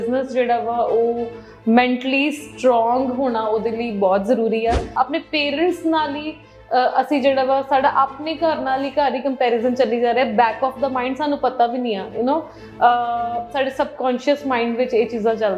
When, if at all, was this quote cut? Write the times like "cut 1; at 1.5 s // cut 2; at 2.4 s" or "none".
cut 1; at 4.9 s

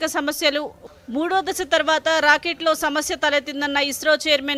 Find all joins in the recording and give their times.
none

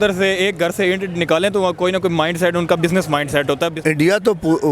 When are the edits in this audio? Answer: cut 1; at 3.8 s

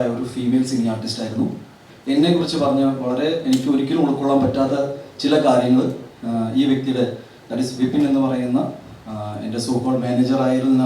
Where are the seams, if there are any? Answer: cut 1; at 1.9 s

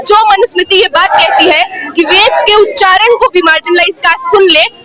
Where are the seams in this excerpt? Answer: none

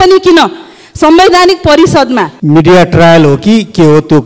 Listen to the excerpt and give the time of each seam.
cut 1; at 2.3 s

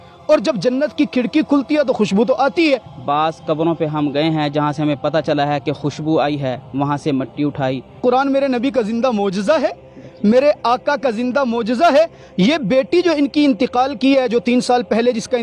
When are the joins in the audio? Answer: cut 1; at 2.9 s // cut 2; at 8.0 s

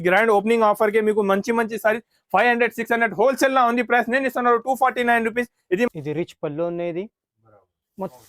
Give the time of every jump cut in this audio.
cut 1; at 5.9 s

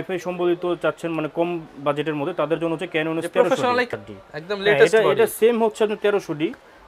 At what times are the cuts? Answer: cut 1; at 3.9 s

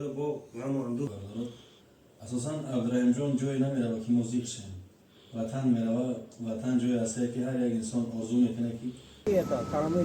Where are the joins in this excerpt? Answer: cut 1; at 1.1 s // cut 2; at 9.3 s

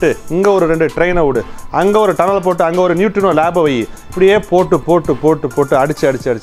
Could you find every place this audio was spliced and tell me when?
cut 1; at 4.0 s

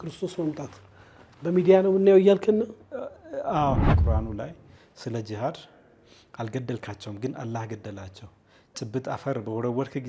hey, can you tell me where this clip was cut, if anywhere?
cut 1; at 3.9 s

